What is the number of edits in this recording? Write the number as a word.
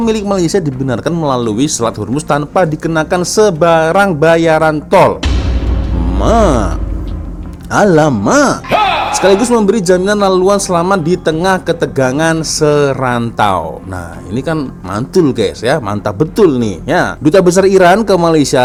zero